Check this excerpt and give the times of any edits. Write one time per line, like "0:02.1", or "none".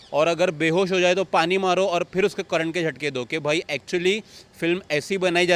none